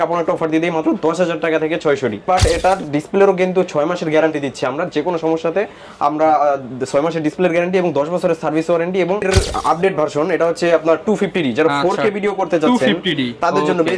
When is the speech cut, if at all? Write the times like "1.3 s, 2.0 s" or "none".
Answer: 2.3 s, 9.2 s